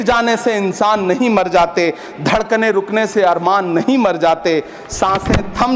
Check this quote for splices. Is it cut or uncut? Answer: uncut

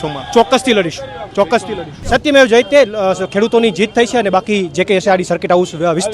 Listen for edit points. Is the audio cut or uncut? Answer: cut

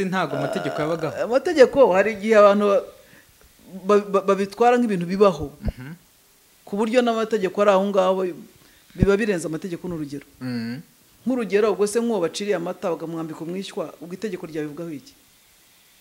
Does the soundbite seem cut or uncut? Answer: uncut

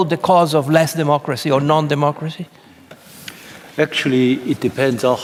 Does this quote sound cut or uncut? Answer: uncut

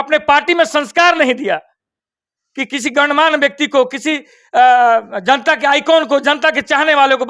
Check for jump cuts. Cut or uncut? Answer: uncut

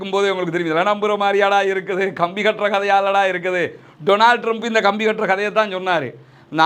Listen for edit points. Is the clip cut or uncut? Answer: uncut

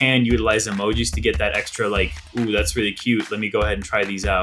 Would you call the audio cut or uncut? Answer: cut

